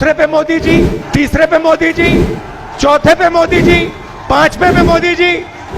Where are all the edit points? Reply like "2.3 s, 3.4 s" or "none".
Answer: 1.0 s